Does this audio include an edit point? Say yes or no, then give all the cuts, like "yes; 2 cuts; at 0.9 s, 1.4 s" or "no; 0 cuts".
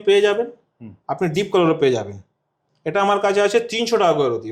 no; 0 cuts